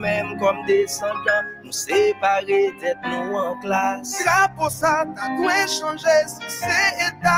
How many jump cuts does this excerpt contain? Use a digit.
1